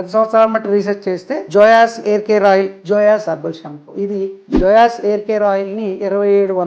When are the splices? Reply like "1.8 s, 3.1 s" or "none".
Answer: 1.3 s, 2.8 s, 4.4 s